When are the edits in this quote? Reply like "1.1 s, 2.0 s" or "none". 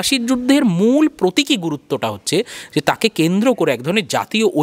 none

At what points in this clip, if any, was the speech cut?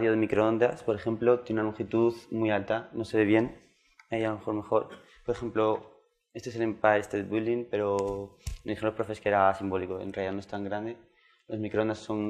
8.5 s

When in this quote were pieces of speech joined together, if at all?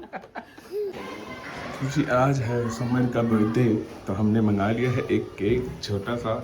1.0 s

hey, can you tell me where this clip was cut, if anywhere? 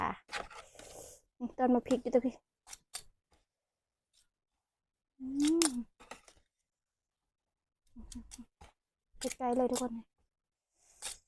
none

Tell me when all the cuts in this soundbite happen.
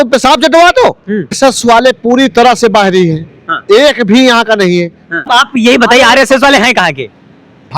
1.4 s, 5.3 s

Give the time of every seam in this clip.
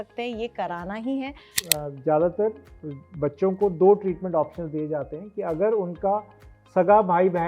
1.6 s

